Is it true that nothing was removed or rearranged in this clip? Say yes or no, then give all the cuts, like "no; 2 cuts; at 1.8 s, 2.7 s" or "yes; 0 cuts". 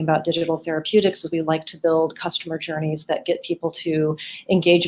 yes; 0 cuts